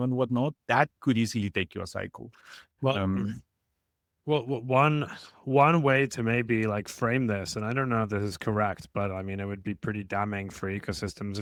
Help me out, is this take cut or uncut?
uncut